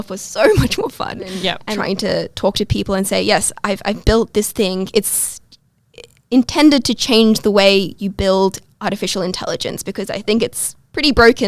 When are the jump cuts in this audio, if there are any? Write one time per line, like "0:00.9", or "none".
0:01.7